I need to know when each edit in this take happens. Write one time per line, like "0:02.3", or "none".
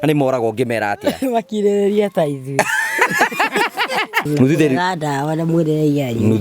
0:04.3

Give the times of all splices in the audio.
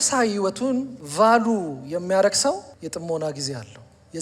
0:01.0
0:02.7

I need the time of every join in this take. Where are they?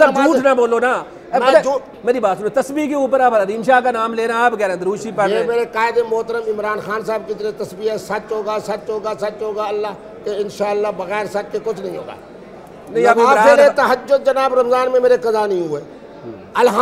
none

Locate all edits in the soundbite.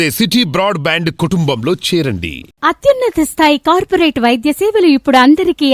none

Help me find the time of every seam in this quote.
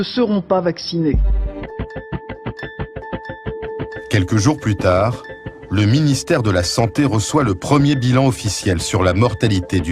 none

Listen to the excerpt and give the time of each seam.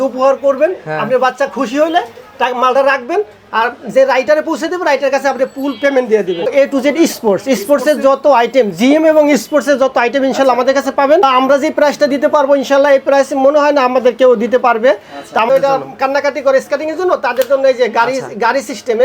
0:06.5
0:11.2
0:15.5

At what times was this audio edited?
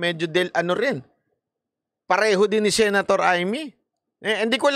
none

